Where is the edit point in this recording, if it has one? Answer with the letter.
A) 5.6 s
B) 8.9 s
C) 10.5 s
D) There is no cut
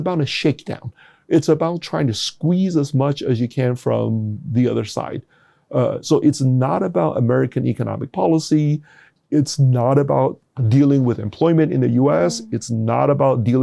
C